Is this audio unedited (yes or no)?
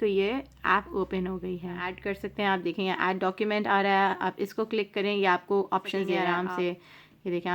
no